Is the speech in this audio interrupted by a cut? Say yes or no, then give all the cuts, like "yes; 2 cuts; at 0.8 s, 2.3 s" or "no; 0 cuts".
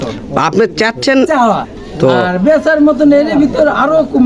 yes; 1 cut; at 1.6 s